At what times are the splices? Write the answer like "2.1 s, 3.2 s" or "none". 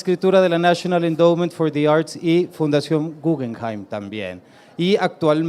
none